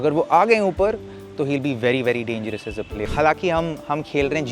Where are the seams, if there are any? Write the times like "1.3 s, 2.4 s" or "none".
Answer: 3.0 s